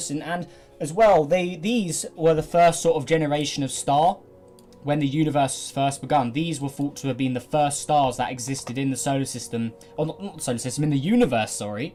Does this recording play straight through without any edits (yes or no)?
yes